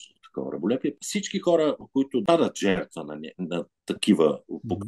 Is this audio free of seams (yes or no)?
no